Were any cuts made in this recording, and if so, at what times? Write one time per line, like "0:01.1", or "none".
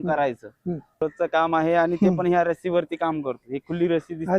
0:01.0

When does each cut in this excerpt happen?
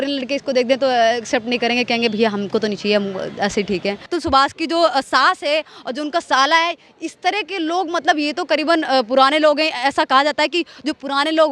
0:04.1

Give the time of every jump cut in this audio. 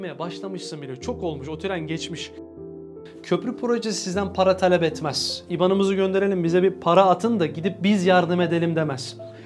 0:02.7

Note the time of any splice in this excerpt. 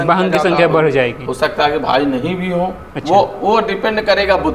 0:02.9

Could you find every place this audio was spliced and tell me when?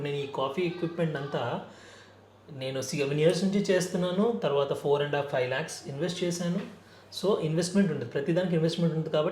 none

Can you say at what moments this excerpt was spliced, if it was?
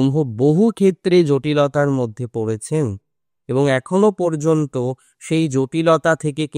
none

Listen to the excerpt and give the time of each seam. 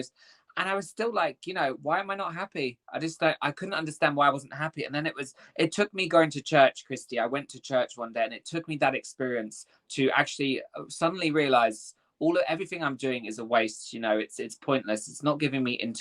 none

